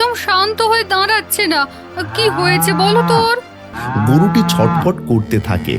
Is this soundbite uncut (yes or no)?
no